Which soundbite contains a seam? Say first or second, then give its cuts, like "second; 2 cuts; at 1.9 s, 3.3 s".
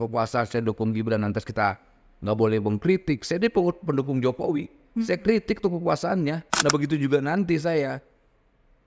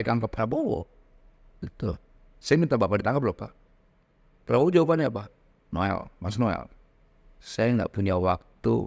first; 1 cut; at 6.5 s